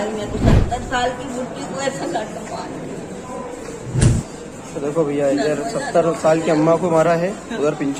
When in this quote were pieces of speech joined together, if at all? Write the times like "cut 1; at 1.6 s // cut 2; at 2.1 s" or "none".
none